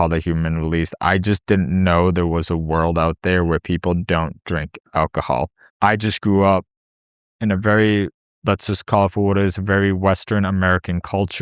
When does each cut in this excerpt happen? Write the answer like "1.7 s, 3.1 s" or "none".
5.6 s